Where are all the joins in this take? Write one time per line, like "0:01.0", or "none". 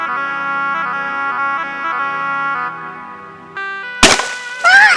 0:03.5